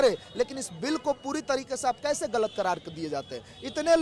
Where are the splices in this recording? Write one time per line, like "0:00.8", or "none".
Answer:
none